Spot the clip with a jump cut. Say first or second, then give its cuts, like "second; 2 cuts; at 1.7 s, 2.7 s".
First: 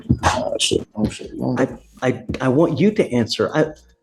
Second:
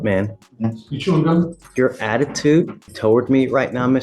second; 2 cuts; at 1.6 s, 2.8 s